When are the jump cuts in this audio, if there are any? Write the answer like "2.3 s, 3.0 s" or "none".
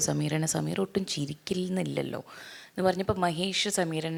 none